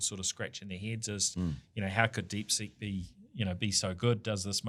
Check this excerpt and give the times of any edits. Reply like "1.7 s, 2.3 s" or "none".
none